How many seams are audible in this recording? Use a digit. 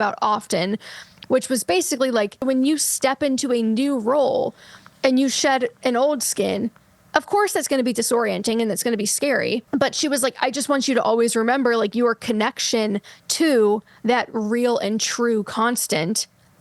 2